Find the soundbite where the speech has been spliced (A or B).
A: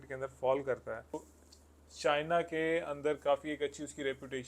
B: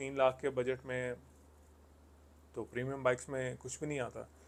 A